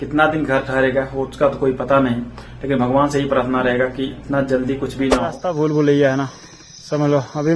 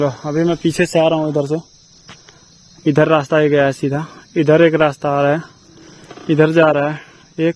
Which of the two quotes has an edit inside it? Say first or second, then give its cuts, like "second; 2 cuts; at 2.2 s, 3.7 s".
first; 1 cut; at 5.4 s